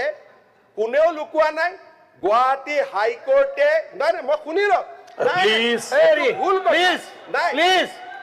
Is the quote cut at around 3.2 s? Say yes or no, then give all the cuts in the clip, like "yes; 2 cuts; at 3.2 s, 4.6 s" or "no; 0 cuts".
no; 0 cuts